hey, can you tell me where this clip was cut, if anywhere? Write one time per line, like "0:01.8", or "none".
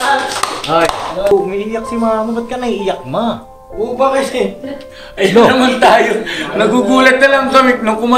0:01.3